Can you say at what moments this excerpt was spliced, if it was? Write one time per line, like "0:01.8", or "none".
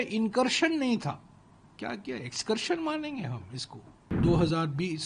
0:04.1